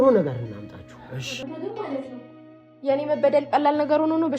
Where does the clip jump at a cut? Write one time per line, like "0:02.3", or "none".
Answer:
0:01.4